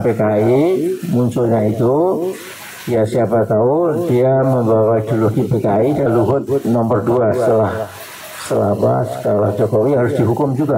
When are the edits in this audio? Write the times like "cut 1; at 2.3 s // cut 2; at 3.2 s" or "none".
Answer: cut 1; at 6.1 s